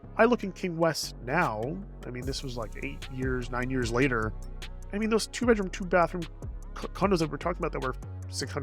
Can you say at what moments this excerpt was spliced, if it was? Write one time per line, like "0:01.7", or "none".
none

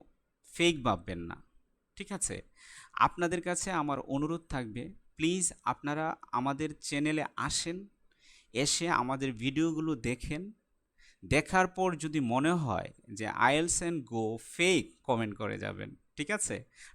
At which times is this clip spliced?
0:15.0

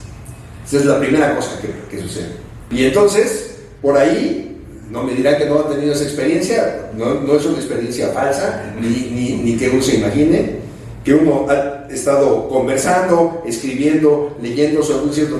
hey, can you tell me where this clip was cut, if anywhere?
0:02.6

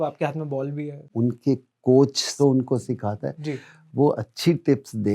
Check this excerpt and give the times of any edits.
0:01.0
0:02.3

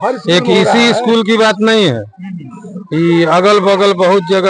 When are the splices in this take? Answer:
none

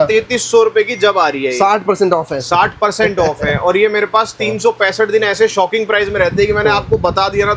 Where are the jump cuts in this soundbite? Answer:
none

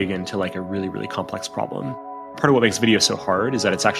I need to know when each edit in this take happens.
0:02.4

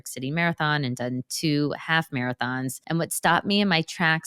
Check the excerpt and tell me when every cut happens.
0:02.8

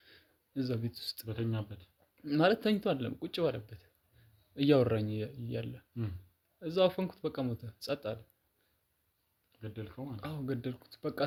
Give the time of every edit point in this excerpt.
none

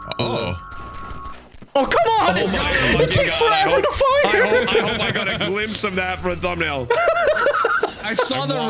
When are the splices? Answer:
none

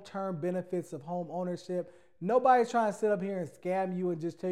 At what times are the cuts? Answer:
none

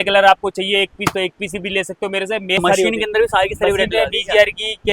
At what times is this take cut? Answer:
0:02.6

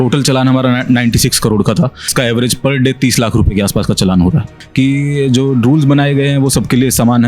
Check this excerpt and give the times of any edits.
0:02.1
0:04.6

